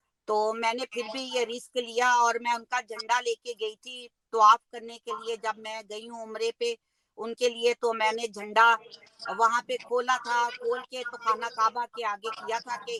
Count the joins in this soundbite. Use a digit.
0